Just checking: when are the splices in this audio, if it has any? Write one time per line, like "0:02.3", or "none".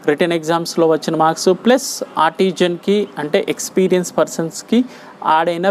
none